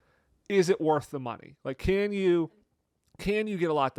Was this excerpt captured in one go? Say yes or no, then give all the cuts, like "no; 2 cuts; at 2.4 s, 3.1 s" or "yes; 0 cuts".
yes; 0 cuts